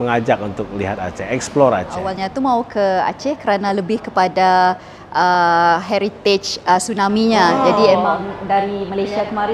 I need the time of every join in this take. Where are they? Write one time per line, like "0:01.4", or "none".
0:02.2

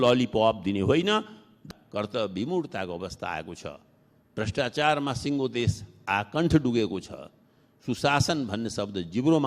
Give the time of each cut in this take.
0:01.6

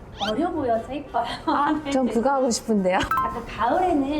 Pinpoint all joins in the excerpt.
0:03.1

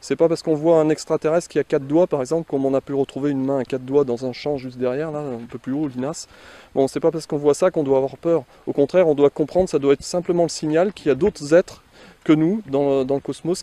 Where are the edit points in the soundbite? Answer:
none

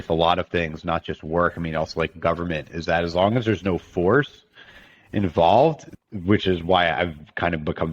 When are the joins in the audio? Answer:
0:05.8

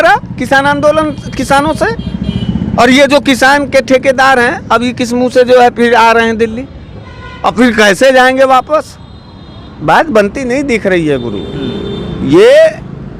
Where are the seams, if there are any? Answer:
none

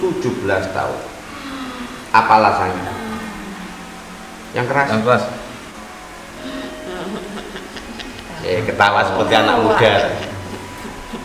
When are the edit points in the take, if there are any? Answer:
0:05.8

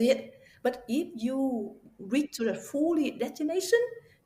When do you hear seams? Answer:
none

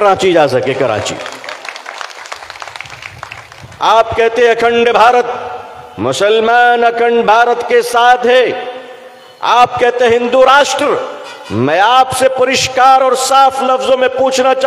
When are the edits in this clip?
none

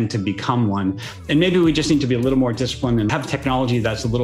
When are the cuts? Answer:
0:03.1

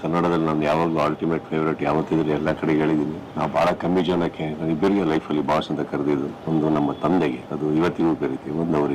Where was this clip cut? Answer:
0:03.2
0:06.4
0:07.5

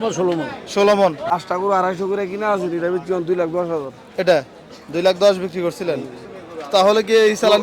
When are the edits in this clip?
0:01.2

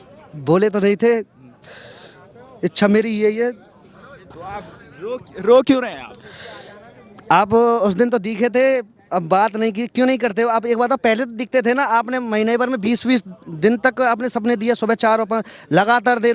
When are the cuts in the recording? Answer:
none

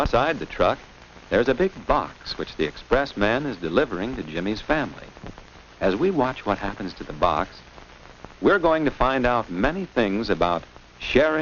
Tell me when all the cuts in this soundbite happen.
0:08.8

